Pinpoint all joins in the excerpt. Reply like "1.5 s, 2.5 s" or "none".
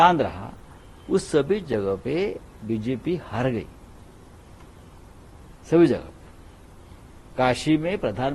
none